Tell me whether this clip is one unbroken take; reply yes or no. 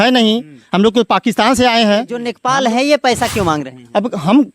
no